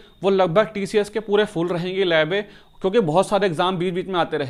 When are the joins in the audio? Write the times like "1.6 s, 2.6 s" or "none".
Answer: none

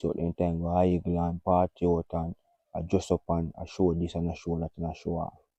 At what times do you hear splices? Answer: none

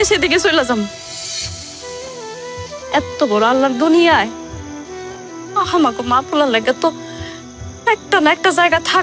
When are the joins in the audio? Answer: none

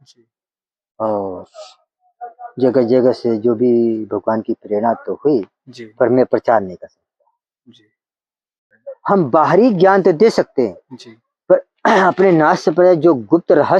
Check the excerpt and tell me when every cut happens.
8.8 s

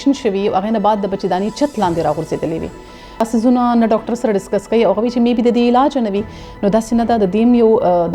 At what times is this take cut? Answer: 3.2 s

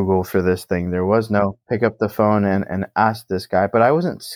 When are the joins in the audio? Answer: 1.6 s

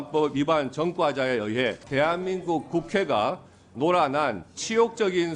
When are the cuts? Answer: 1.8 s

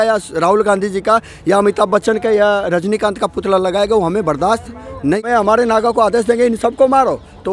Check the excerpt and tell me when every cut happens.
5.2 s

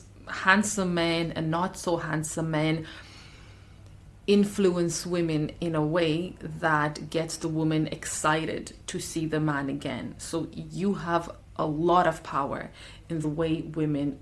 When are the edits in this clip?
13.2 s

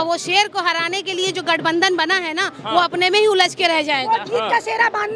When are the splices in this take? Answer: none

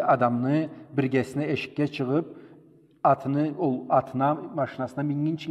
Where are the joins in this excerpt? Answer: none

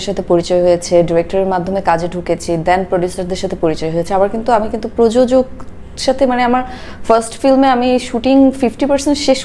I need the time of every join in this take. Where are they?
none

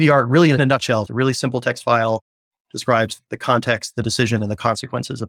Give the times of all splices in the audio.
1.1 s

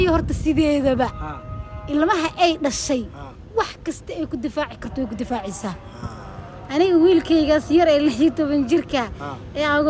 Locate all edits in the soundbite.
none

